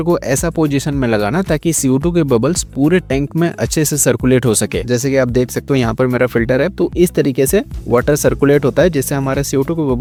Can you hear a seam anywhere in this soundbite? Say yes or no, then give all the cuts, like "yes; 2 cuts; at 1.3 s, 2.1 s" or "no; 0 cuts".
no; 0 cuts